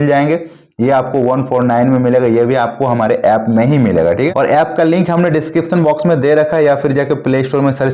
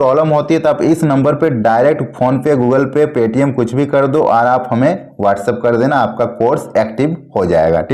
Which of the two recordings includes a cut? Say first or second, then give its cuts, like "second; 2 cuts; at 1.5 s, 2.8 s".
first; 1 cut; at 4.3 s